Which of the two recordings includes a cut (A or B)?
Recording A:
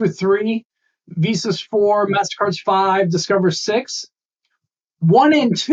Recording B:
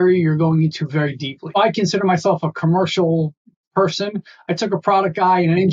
B